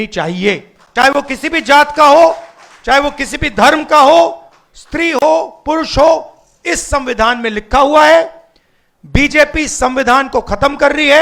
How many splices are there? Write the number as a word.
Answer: zero